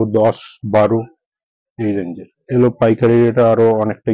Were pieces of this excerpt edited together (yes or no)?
yes